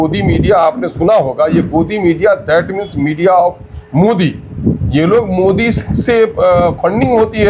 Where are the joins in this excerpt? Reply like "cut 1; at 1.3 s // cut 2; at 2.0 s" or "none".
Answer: none